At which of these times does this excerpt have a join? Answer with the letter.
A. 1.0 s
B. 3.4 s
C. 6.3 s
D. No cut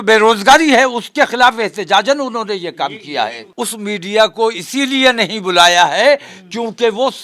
B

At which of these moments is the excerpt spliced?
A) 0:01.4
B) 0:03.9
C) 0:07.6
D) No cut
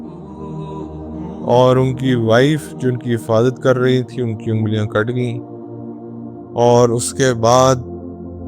A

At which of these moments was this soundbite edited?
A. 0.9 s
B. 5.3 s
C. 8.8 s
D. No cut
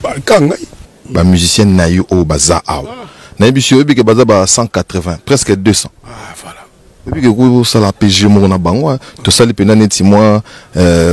A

